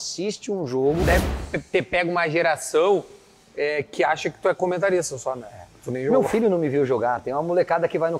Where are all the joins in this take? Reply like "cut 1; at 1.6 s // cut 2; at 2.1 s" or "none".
cut 1; at 1.0 s

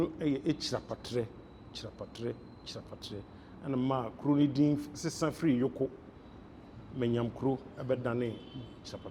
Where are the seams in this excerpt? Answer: none

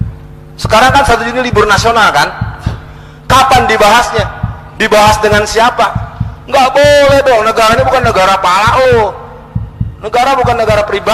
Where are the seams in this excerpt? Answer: none

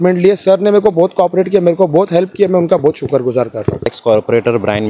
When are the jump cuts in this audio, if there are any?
cut 1; at 3.9 s

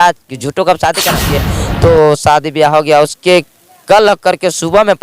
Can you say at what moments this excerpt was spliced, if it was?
cut 1; at 1.4 s

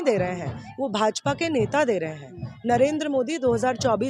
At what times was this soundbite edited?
none

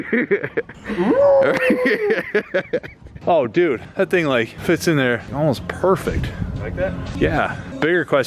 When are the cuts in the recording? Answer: cut 1; at 3.1 s

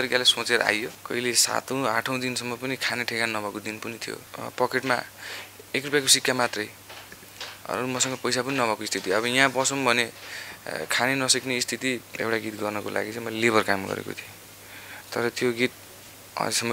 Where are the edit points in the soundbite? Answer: cut 1; at 1.0 s // cut 2; at 4.3 s // cut 3; at 12.1 s

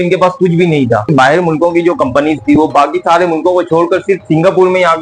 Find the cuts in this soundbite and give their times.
cut 1; at 1.1 s

